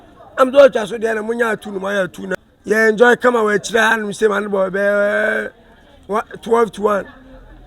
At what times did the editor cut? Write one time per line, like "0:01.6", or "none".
0:02.2